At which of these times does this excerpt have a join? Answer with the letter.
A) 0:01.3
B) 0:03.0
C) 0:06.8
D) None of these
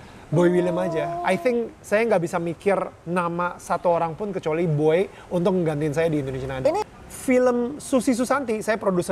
C